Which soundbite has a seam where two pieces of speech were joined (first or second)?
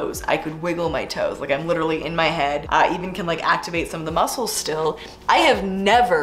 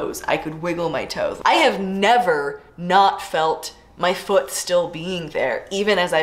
second